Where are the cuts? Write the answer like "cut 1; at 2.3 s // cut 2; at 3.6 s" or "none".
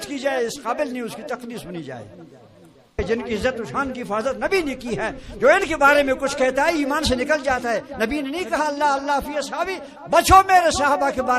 cut 1; at 3.0 s